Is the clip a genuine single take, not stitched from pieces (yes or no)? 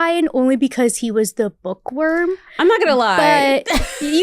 yes